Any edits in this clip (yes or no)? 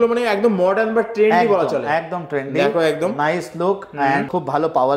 no